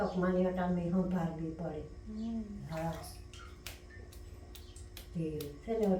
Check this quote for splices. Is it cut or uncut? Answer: uncut